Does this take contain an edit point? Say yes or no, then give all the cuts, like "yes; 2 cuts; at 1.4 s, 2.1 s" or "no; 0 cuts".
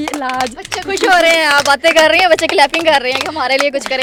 no; 0 cuts